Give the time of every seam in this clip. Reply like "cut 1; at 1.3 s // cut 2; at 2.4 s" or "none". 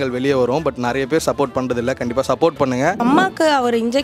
cut 1; at 3.0 s